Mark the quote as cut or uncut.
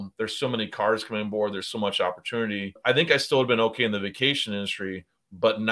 cut